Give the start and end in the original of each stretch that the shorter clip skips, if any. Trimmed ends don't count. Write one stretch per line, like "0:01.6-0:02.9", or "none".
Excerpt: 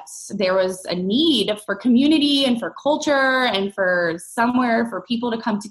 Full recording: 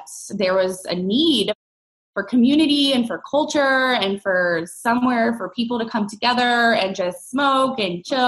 0:01.6-0:02.1